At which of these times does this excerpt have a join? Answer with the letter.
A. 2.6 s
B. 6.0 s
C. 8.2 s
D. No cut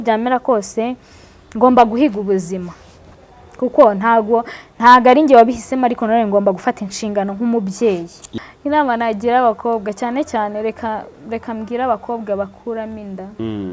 C